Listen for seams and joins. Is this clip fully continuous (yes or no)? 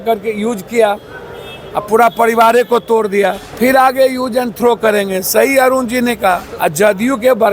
no